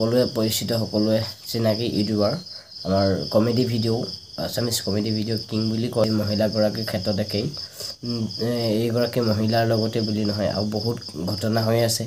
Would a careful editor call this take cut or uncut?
cut